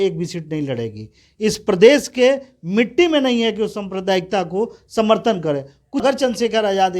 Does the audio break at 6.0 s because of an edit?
yes; 1 cut; at 6.0 s

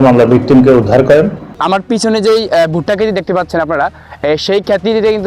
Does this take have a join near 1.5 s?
yes; 1 cut; at 1.5 s

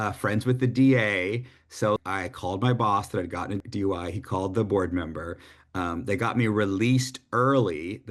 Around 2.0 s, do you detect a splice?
yes; 2 cuts; at 2.0 s, 3.6 s

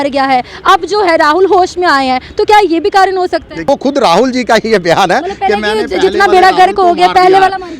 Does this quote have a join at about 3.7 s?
yes; 1 cut; at 3.7 s

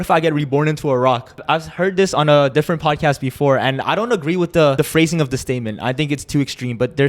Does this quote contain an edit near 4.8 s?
yes; 2 cuts; at 1.4 s, 4.8 s

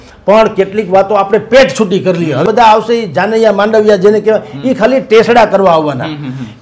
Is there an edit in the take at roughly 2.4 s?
yes; 1 cut; at 2.4 s

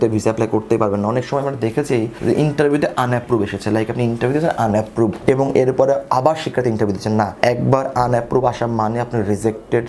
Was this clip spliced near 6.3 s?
no; 0 cuts

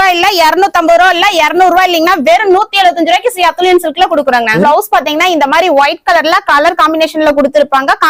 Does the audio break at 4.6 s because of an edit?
yes; 1 cut; at 4.6 s

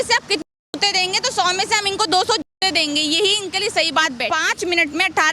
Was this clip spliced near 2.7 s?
no; 1 cut; at 4.3 s

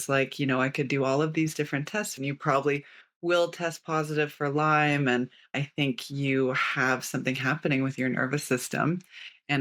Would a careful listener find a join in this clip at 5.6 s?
yes; 2 cuts; at 2.1 s, 5.6 s

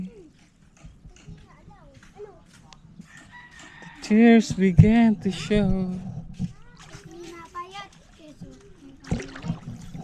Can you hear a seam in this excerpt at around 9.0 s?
no; 0 cuts

